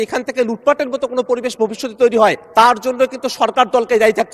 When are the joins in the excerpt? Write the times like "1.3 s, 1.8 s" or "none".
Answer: 2.4 s